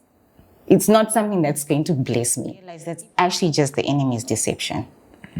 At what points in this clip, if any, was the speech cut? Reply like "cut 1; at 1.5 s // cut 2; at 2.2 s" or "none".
cut 1; at 3.0 s